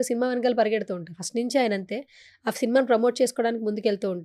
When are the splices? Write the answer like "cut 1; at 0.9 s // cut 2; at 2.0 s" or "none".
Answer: none